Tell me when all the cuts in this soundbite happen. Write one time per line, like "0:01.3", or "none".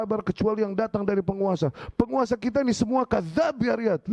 none